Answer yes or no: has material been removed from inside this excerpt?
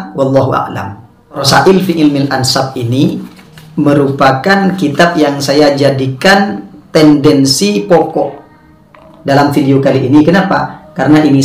yes